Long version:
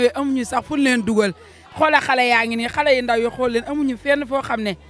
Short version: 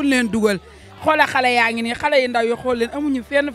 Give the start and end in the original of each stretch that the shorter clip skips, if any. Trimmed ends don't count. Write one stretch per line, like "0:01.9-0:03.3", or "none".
none